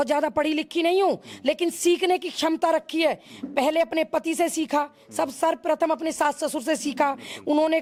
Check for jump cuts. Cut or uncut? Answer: uncut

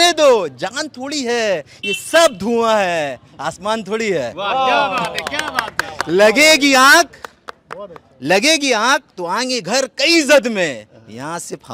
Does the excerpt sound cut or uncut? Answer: uncut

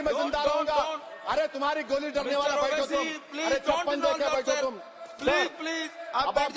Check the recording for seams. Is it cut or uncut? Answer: uncut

